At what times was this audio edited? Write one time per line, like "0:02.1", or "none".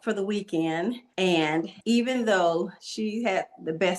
0:01.4
0:02.8